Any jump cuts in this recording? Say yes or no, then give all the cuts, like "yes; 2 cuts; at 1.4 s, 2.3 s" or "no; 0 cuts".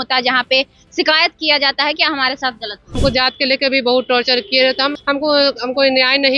yes; 2 cuts; at 3.0 s, 5.0 s